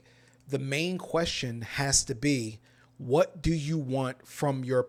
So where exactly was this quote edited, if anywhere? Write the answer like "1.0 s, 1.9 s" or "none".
none